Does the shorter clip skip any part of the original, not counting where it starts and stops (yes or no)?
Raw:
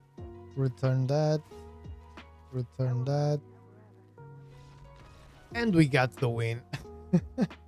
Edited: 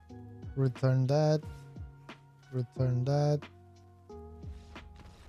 no